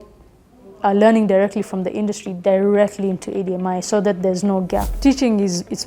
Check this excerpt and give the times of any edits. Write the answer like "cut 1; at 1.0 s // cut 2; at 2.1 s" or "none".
cut 1; at 4.9 s